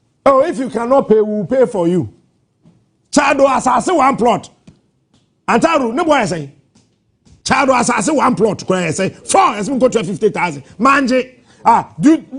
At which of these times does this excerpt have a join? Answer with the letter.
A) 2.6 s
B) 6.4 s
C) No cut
C